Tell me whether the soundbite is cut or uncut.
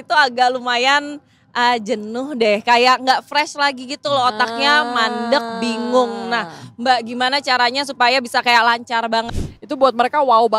cut